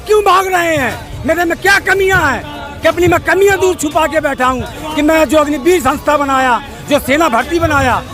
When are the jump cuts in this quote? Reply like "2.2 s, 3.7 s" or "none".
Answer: none